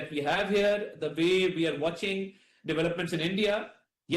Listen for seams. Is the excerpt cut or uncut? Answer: cut